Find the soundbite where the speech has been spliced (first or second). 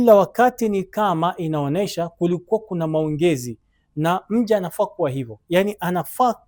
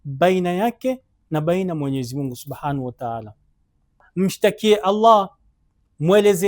second